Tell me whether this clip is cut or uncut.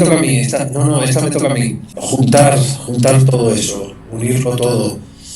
cut